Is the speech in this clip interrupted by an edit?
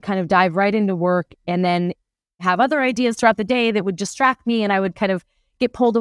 yes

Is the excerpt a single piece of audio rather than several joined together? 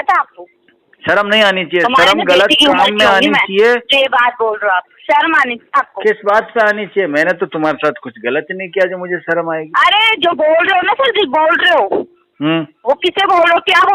yes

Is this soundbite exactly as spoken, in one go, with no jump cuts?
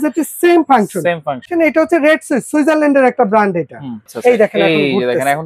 no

